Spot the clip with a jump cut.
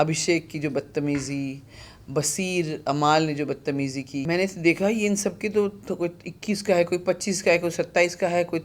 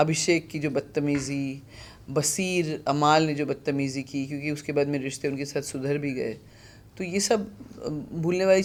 first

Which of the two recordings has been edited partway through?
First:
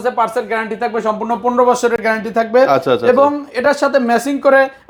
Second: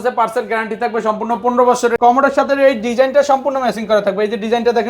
second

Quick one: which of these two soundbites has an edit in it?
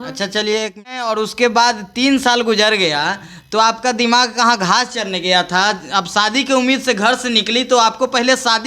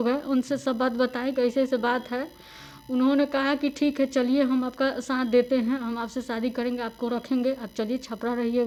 first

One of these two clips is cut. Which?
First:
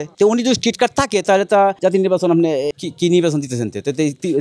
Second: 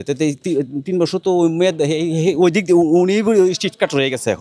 first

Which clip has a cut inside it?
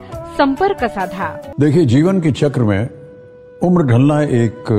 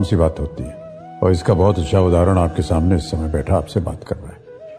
first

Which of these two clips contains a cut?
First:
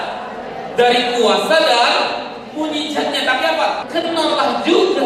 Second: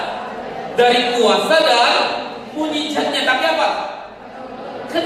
first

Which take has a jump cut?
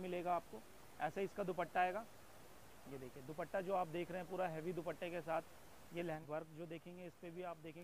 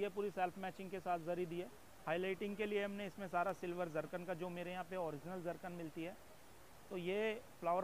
first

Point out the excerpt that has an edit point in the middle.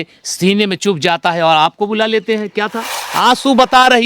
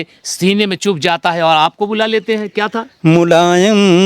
first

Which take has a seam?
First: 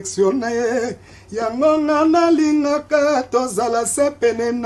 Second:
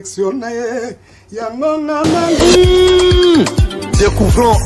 second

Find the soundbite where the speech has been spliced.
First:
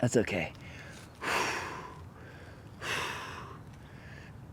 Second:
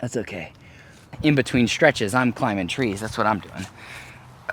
second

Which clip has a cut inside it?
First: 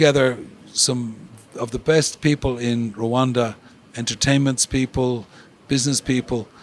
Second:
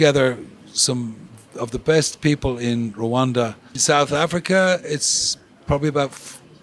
second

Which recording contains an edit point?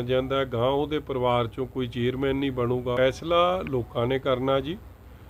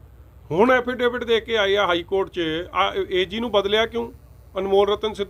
first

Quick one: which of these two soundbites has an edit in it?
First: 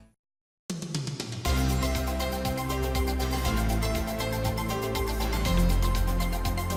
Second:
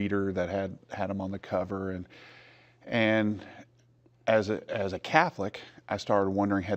second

